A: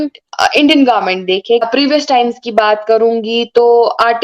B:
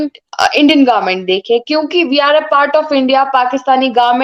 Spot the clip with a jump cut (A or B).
A